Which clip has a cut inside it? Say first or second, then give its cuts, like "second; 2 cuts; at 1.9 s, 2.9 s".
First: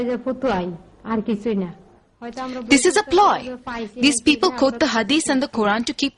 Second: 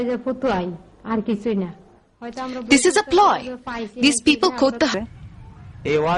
first; 1 cut; at 4.9 s